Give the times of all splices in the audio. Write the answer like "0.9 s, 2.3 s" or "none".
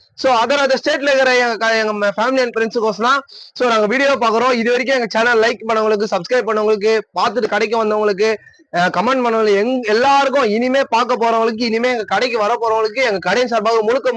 none